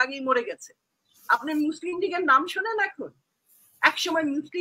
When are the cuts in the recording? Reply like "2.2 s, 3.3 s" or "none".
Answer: none